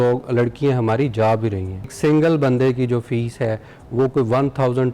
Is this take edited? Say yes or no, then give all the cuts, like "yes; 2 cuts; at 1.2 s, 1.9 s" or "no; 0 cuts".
yes; 1 cut; at 1.9 s